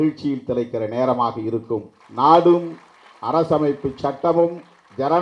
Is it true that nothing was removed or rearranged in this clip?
no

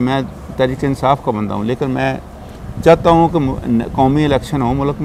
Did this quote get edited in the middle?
no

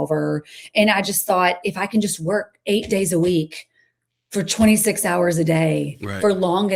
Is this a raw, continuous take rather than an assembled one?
yes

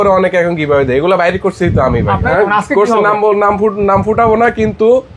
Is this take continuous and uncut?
yes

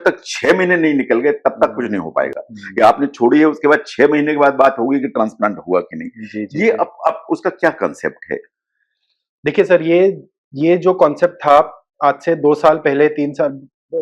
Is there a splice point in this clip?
no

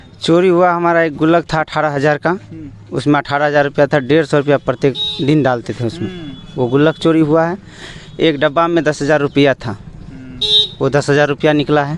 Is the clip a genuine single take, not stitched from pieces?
yes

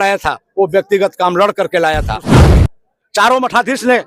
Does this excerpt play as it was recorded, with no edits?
no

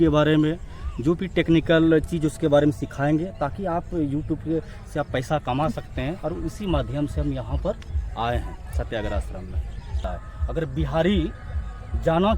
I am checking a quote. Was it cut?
yes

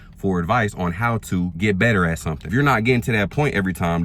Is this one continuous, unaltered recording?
no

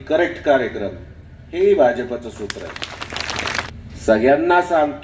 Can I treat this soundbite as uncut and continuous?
no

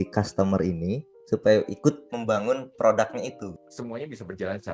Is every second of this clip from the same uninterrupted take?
no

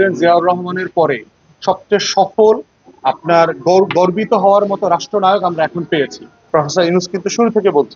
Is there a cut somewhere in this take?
yes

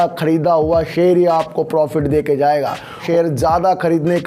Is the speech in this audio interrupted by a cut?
yes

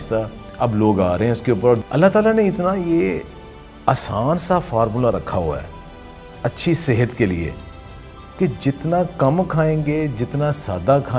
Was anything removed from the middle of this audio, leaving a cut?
yes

